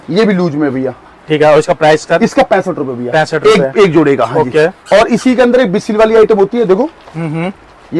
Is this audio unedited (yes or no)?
yes